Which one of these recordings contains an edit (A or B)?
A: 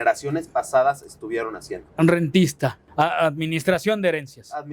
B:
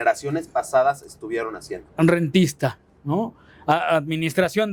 A